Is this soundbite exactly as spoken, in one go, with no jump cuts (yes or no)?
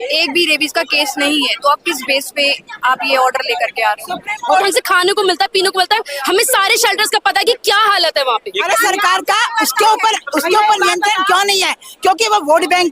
no